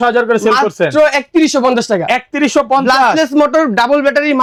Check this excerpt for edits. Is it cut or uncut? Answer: uncut